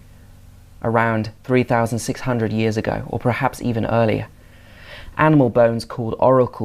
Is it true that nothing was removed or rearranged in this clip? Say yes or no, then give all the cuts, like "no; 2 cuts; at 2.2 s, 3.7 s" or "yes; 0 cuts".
yes; 0 cuts